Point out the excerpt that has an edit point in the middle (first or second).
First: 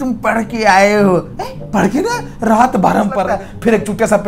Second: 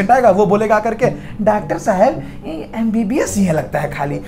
first